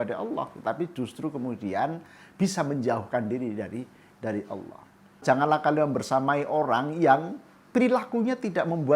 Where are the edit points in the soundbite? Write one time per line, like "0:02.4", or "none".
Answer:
0:05.2